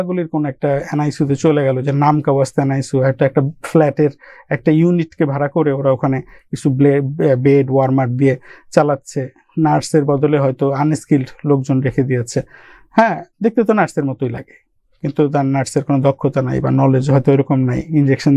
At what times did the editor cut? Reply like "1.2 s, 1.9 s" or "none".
none